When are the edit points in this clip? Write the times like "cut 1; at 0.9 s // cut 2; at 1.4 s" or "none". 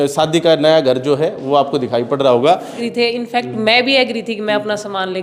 cut 1; at 2.8 s

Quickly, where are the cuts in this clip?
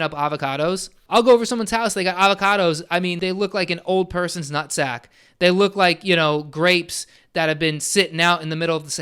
cut 1; at 1.0 s // cut 2; at 3.1 s

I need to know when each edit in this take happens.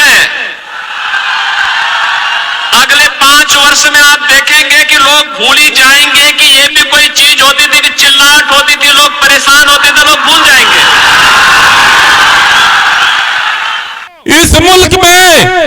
cut 1; at 14.1 s

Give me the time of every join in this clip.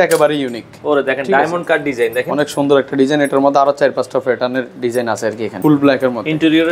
cut 1; at 5.6 s

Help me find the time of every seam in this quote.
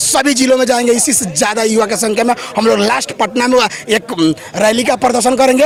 none

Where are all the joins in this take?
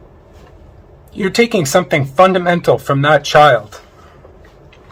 none

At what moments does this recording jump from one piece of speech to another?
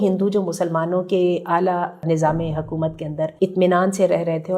cut 1; at 2.0 s // cut 2; at 3.3 s

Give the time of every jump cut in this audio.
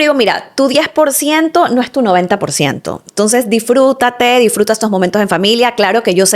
none

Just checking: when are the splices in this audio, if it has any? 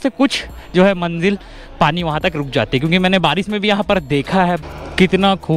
cut 1; at 4.6 s

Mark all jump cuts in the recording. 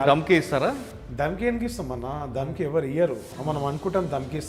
none

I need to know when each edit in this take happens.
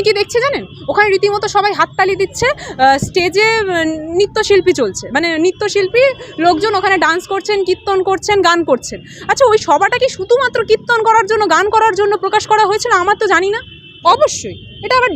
cut 1; at 13.8 s

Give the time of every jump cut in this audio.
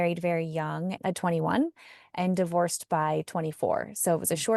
cut 1; at 1.0 s

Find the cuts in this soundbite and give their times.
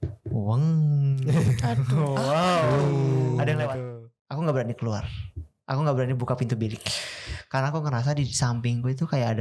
cut 1; at 3.8 s

